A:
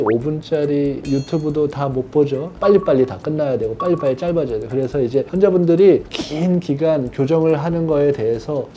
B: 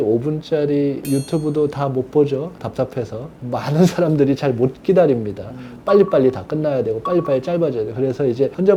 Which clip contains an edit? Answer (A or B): A